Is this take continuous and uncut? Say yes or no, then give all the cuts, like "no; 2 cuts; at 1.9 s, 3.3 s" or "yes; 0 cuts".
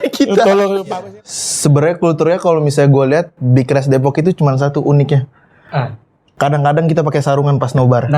no; 1 cut; at 1.0 s